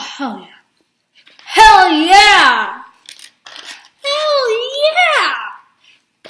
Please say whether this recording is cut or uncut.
uncut